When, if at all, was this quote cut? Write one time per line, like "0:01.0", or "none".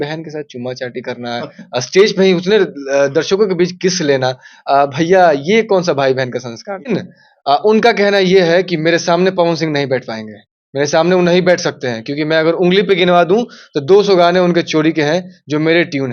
0:06.9